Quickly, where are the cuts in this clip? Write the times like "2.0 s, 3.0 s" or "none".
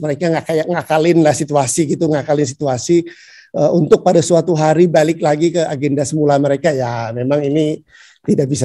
none